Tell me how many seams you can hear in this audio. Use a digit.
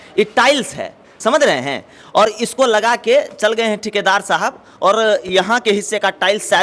0